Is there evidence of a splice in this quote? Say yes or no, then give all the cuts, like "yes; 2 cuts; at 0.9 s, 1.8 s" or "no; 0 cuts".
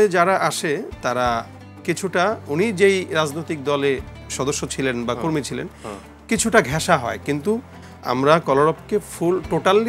no; 0 cuts